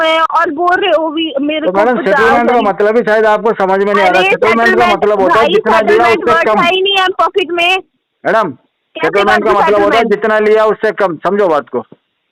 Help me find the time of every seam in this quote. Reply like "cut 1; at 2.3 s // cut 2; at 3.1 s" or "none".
none